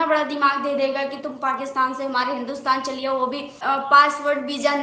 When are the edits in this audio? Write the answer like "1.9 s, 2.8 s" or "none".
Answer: 3.6 s

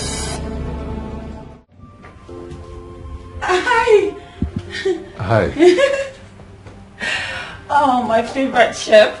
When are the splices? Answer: 1.4 s

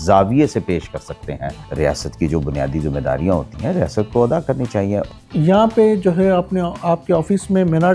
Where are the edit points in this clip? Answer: 1.6 s, 5.1 s

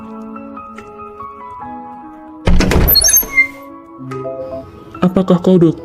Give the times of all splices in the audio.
1.1 s

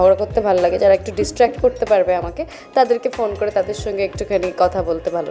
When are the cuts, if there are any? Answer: none

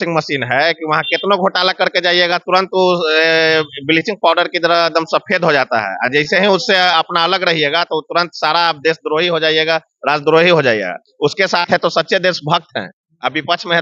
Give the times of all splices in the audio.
none

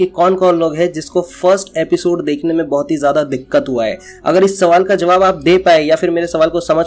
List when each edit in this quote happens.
none

